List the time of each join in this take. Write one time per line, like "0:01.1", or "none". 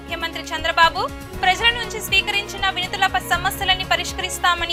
none